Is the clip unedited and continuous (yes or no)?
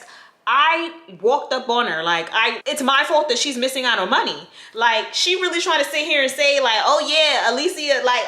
no